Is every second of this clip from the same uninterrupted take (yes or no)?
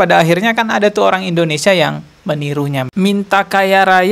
no